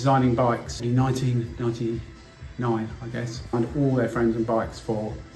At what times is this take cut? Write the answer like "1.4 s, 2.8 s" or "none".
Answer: 0.8 s, 3.5 s